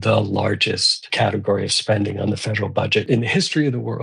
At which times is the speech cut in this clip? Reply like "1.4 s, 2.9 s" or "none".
1.1 s, 3.1 s